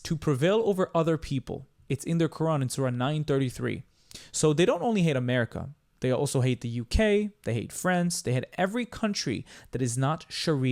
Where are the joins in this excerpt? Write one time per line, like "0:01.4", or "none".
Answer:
none